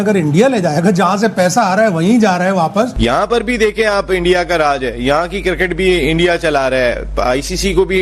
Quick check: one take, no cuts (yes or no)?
yes